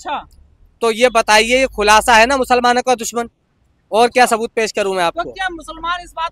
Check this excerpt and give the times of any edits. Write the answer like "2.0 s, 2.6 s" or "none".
none